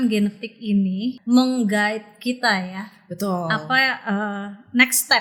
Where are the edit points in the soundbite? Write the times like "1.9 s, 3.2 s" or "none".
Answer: 1.2 s

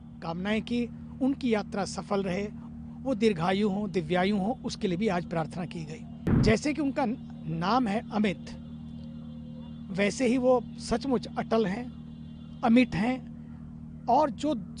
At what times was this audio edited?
6.1 s

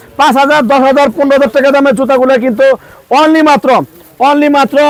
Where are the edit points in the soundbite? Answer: none

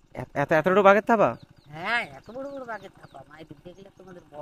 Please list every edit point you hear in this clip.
none

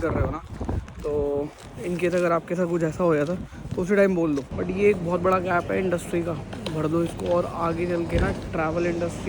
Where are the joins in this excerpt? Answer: 4.5 s

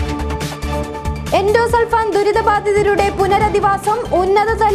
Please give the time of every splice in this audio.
1.0 s

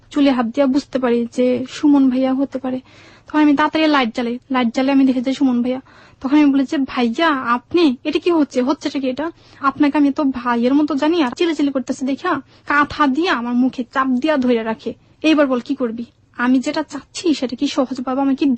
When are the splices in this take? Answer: 11.3 s

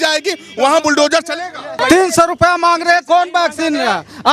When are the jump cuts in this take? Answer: 1.8 s

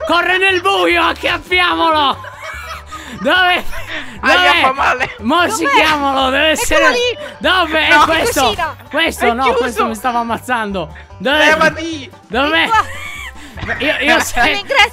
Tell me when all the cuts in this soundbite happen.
none

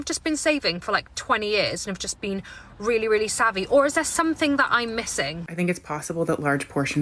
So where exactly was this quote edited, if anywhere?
5.5 s

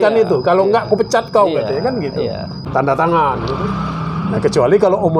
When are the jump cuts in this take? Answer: 2.6 s

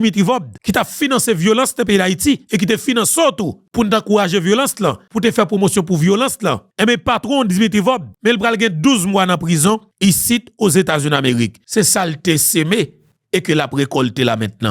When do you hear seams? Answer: none

